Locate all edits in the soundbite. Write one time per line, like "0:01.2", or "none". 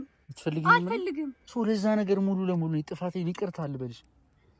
0:01.4